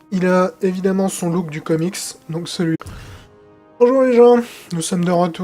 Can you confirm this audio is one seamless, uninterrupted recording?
yes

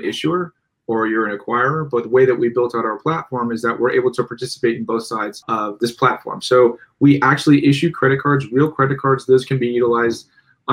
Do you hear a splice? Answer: yes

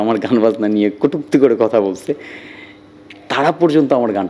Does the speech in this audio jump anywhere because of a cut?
no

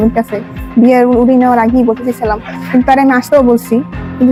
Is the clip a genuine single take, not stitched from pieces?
yes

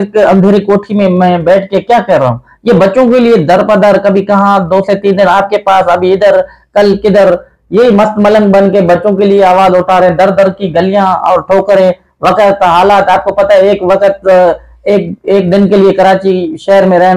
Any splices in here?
no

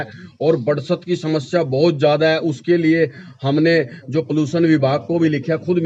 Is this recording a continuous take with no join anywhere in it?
yes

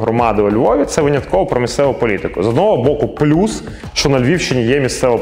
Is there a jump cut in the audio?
no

